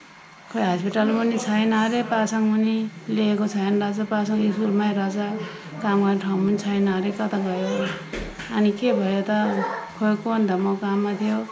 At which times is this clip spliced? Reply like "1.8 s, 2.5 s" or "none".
none